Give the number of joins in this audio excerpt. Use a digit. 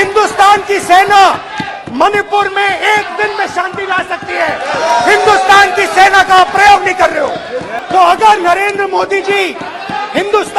1